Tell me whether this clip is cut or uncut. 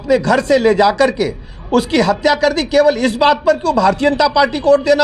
uncut